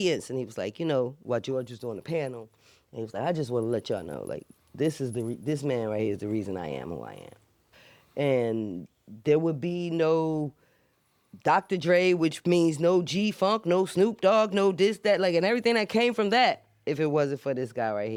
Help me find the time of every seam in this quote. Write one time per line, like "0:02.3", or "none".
none